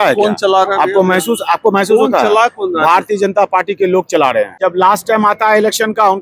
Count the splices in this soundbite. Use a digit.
1